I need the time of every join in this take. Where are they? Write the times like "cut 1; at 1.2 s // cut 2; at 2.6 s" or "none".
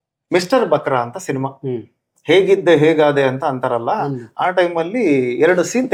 none